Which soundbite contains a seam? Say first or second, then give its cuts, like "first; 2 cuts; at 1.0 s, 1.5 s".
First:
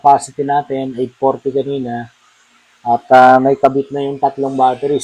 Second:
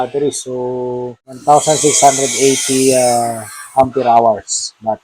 second; 1 cut; at 1.3 s